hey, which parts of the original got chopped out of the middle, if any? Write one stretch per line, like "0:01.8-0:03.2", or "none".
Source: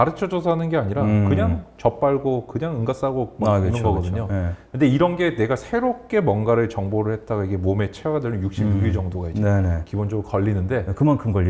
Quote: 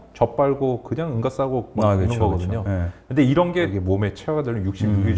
0:05.3-0:07.5